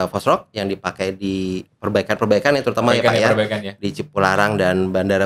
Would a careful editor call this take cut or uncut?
uncut